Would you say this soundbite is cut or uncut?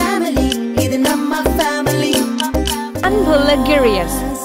uncut